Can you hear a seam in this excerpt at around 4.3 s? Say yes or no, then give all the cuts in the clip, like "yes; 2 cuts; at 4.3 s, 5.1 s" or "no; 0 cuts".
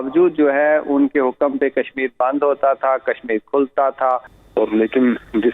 yes; 1 cut; at 4.3 s